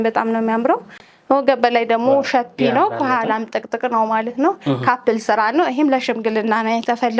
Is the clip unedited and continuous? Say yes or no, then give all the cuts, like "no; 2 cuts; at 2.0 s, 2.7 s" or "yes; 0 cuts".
yes; 0 cuts